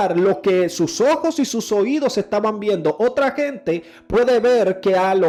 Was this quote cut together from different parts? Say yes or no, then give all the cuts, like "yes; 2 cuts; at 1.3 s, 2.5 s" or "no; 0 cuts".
no; 0 cuts